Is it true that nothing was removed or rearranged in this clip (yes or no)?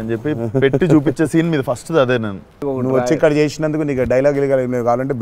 no